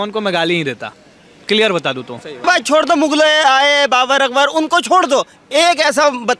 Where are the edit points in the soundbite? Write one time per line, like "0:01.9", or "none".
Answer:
0:02.4